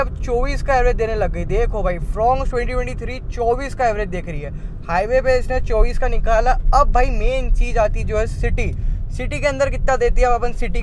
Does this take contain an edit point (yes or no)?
no